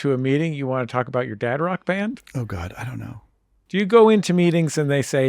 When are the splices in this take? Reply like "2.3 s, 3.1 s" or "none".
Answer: 3.6 s